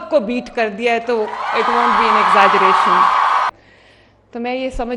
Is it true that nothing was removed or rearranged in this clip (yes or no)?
no